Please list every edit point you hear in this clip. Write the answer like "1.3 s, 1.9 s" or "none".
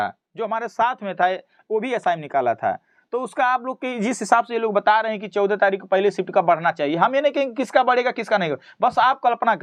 none